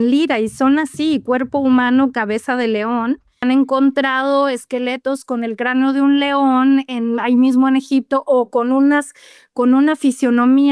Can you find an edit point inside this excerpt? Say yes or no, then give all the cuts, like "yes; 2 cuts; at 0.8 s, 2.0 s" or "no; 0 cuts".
yes; 1 cut; at 3.4 s